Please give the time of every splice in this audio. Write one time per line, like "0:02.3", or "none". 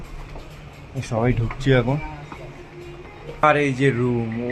0:03.4